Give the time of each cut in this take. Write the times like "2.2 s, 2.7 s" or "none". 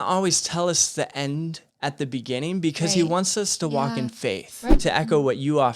1.6 s, 4.8 s